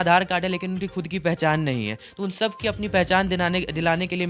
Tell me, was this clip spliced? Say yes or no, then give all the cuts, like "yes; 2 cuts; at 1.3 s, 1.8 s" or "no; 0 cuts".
no; 0 cuts